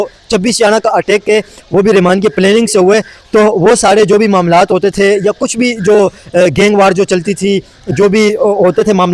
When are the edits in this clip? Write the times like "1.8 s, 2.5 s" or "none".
none